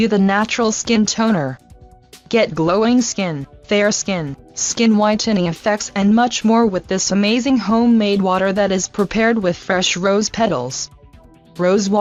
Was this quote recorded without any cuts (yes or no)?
yes